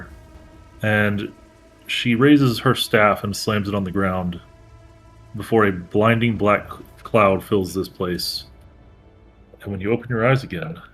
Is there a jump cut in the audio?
no; 0 cuts

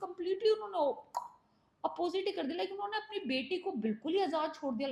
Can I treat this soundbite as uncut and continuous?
yes; 0 cuts

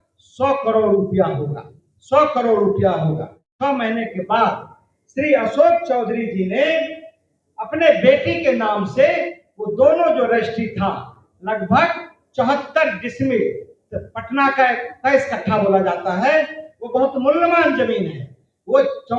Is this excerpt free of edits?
no; 1 cut; at 3.5 s

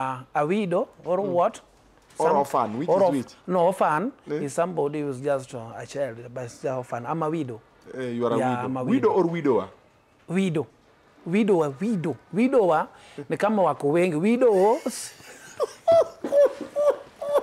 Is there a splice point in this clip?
no; 0 cuts

